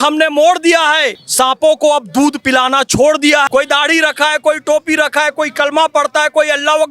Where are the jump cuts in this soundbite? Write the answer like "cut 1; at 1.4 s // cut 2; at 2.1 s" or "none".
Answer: cut 1; at 1.2 s // cut 2; at 3.5 s